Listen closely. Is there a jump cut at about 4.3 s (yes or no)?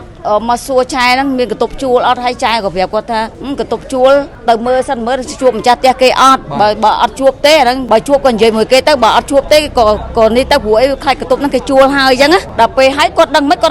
yes